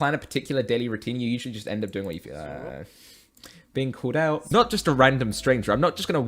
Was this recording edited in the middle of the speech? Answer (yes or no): yes